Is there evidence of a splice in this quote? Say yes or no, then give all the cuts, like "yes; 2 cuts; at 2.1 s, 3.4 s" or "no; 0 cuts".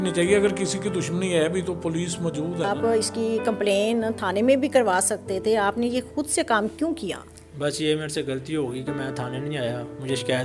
yes; 1 cut; at 2.7 s